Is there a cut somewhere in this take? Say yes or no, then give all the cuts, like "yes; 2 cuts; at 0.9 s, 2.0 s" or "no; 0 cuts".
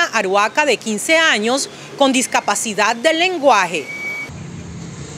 no; 0 cuts